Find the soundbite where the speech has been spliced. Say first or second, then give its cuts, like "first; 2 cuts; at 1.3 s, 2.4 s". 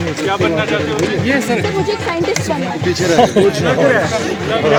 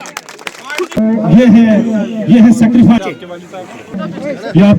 second; 1 cut; at 1.0 s